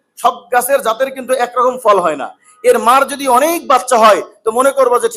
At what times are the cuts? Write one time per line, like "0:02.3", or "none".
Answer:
none